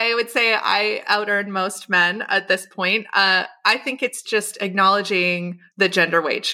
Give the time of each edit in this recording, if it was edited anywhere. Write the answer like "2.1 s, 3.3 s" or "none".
4.2 s, 5.6 s